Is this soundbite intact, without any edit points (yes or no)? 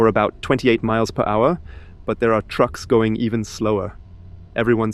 yes